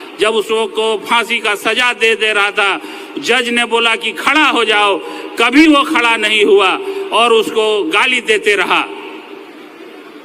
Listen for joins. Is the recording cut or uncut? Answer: uncut